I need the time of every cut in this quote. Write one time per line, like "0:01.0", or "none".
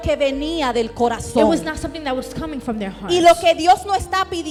none